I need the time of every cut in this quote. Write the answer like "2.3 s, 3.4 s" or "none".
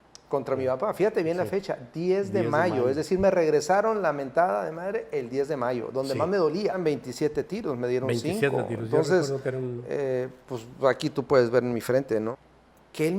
6.8 s, 12.3 s